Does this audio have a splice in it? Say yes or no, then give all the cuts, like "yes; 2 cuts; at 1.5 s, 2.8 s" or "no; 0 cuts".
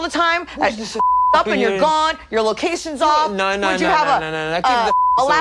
no; 0 cuts